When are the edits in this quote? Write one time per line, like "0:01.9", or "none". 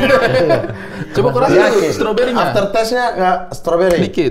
none